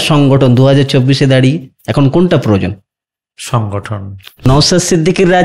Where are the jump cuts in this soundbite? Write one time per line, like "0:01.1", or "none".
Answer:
0:04.5